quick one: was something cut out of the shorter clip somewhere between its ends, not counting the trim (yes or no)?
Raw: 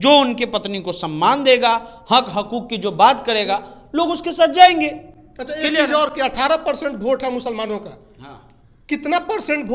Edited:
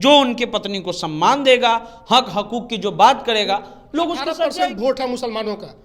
yes